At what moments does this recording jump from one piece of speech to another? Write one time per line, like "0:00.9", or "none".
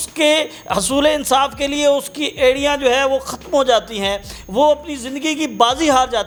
none